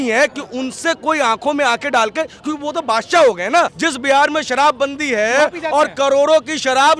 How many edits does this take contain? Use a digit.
1